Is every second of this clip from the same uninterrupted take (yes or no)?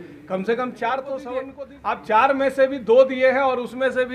no